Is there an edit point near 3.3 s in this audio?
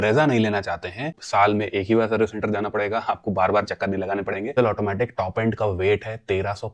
no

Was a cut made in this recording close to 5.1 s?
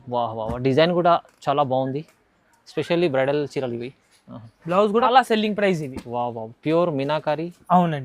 yes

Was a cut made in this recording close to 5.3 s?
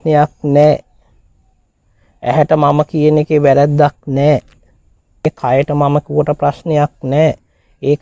yes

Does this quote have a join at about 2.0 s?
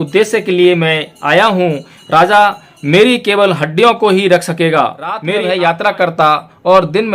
no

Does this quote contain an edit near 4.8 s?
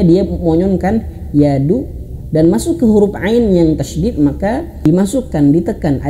yes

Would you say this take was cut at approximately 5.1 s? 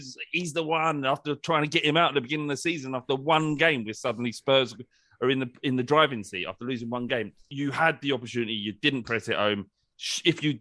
no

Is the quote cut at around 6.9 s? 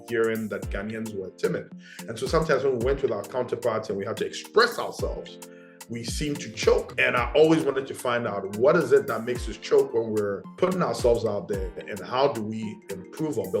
yes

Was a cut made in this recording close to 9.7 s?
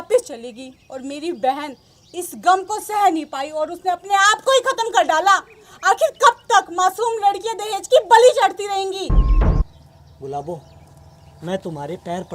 yes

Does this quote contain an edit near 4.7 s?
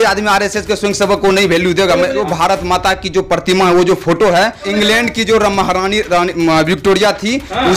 yes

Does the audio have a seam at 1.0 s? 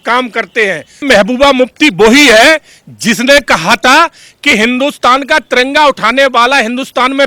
yes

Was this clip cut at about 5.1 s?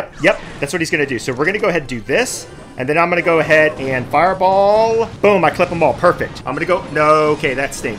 yes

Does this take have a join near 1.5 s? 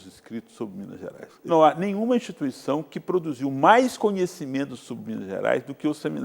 yes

